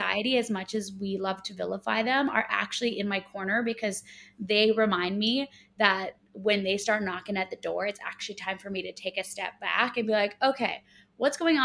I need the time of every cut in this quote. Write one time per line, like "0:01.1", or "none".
none